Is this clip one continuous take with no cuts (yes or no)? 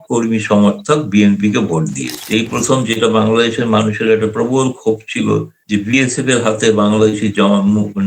no